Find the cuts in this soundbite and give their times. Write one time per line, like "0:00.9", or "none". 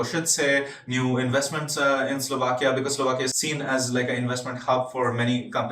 0:03.3